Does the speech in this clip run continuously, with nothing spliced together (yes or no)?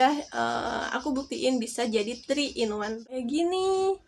no